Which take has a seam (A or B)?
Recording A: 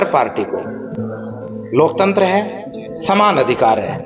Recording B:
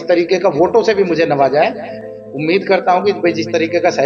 B